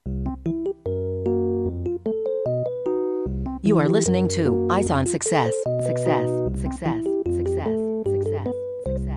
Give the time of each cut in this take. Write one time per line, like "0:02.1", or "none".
none